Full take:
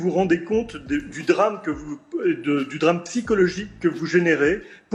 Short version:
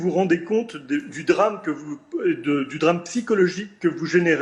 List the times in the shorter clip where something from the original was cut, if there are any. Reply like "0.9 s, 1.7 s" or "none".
none